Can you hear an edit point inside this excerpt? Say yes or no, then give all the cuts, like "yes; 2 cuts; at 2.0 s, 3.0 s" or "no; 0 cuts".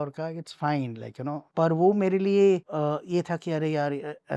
yes; 2 cuts; at 1.5 s, 2.7 s